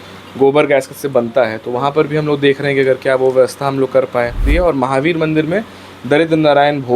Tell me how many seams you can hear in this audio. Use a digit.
1